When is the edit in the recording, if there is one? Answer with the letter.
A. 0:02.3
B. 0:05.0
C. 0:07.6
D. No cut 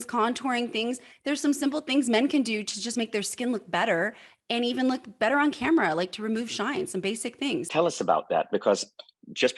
C